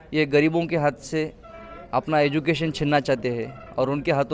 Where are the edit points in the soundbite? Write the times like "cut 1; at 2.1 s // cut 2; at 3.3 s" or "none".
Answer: none